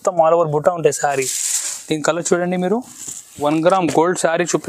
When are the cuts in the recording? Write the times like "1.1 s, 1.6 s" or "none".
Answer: 3.4 s